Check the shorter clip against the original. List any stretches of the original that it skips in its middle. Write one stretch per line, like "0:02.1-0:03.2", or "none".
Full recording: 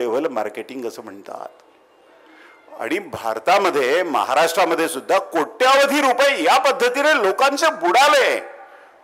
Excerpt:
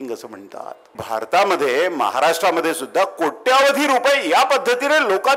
0:01.7-0:03.1